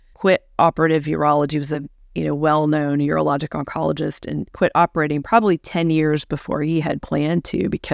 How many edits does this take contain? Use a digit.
1